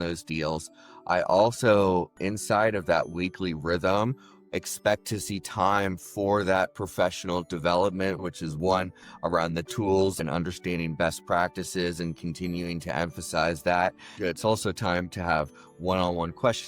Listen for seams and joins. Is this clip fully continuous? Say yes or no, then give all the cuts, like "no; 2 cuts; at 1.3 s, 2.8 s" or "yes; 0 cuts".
no; 3 cuts; at 8.2 s, 10.2 s, 14.1 s